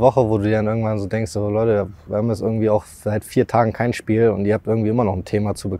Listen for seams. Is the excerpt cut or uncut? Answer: uncut